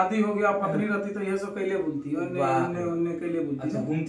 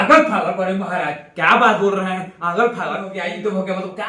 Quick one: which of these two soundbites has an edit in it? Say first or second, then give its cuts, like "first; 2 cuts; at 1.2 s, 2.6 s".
second; 1 cut; at 3.2 s